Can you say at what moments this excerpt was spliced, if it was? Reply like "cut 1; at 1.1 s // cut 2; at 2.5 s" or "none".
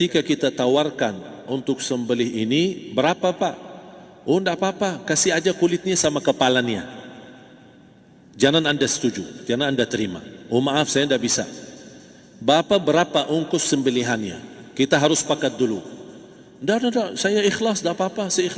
none